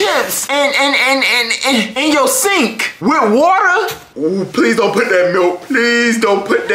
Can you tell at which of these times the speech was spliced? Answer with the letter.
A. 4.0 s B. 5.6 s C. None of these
A